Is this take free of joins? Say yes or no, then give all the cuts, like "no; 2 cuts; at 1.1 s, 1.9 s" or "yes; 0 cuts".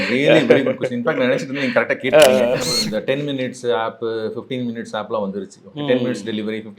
no; 1 cut; at 2.7 s